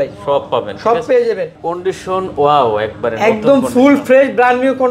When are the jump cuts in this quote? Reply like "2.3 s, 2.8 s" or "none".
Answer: 1.6 s